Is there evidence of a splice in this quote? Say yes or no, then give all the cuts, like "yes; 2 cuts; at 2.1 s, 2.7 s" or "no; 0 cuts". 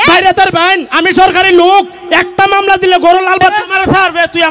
yes; 1 cut; at 3.6 s